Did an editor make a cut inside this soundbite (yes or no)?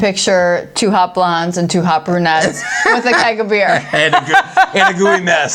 no